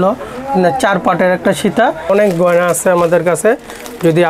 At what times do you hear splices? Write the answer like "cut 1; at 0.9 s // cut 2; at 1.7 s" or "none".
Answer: cut 1; at 2.1 s